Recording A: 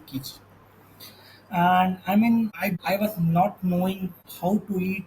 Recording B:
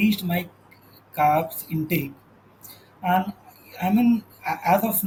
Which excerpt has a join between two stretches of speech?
A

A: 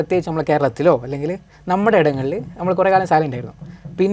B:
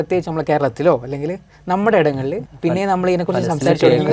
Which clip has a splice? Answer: B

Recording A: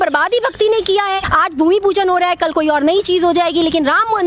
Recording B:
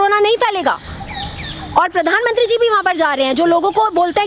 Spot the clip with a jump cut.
A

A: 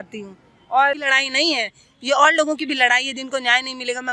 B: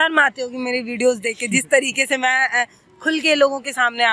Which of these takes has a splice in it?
A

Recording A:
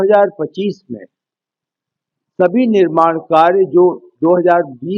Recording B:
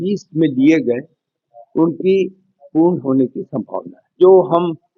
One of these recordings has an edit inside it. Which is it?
B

